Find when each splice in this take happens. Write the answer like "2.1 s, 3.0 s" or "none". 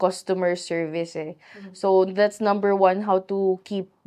none